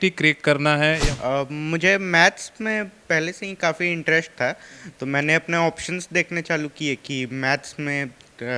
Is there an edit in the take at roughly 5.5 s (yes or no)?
no